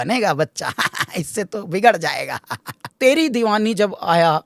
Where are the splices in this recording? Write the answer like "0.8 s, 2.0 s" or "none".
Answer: 2.9 s